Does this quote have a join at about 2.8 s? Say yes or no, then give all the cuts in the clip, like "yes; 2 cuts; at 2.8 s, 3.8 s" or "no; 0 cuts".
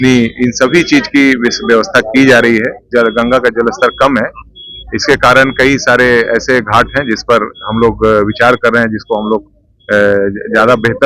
yes; 1 cut; at 2.8 s